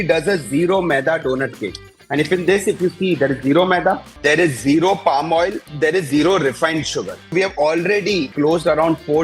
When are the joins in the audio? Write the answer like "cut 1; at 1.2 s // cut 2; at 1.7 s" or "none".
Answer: cut 1; at 4.1 s // cut 2; at 5.6 s // cut 3; at 7.3 s // cut 4; at 8.3 s